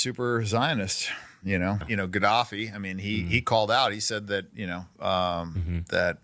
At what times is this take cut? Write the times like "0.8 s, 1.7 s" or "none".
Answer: 1.8 s